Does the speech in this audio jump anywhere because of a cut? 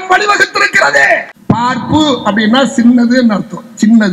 yes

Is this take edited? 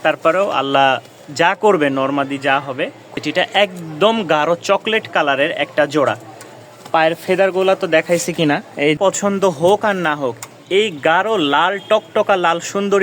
yes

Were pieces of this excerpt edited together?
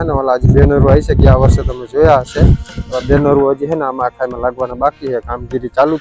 no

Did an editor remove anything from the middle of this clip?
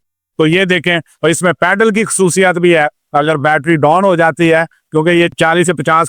no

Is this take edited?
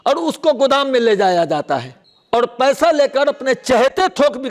no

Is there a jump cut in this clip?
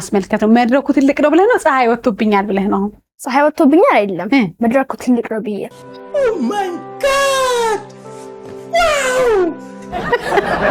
no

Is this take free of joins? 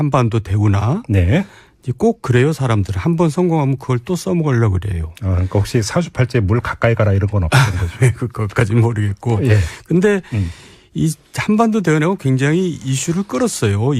no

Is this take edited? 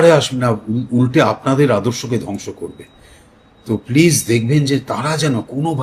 no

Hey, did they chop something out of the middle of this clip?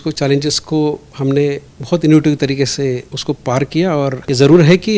yes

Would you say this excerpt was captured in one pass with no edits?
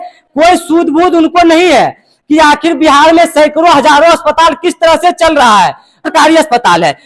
no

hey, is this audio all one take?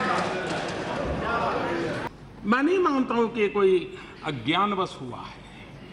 no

